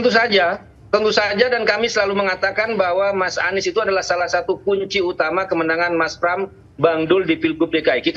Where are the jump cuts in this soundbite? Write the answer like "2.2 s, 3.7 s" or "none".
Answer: none